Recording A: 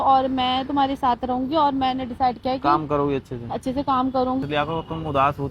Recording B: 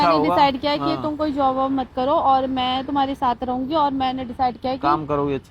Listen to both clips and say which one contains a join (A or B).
A